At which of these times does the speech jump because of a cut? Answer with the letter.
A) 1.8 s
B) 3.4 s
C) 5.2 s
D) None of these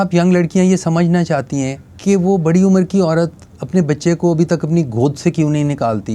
A